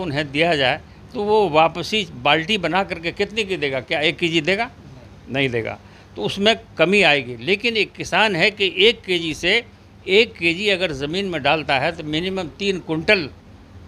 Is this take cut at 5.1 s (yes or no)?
no